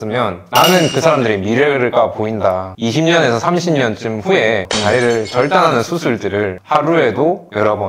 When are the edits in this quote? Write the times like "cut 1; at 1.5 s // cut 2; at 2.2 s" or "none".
cut 1; at 2.7 s // cut 2; at 4.7 s

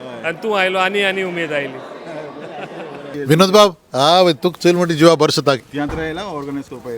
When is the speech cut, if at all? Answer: cut 1; at 3.1 s // cut 2; at 5.6 s

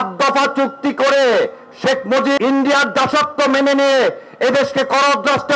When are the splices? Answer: none

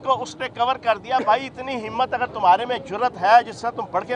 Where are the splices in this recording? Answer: none

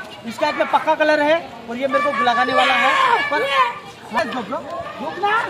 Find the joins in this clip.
cut 1; at 4.2 s

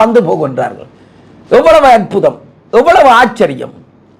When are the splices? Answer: none

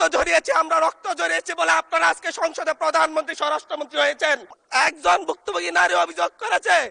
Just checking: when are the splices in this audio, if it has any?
cut 1; at 4.5 s

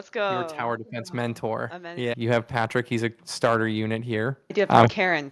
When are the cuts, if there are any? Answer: cut 1; at 2.2 s // cut 2; at 4.4 s

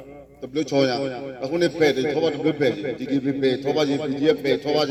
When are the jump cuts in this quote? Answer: none

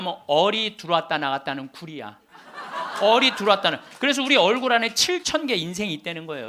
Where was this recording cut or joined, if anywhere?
none

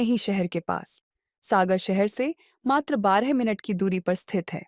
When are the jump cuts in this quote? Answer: none

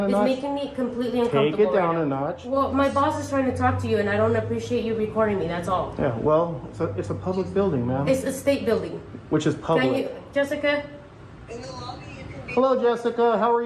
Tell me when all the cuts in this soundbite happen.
cut 1; at 2.4 s

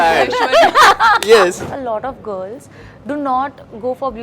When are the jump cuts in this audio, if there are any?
cut 1; at 1.6 s

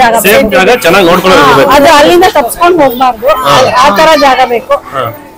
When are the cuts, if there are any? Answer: none

